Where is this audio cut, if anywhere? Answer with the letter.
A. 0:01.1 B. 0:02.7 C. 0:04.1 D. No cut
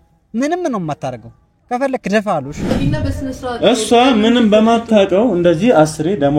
B